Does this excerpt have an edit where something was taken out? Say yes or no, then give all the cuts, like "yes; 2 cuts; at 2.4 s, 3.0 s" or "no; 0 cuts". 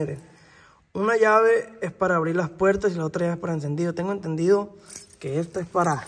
no; 0 cuts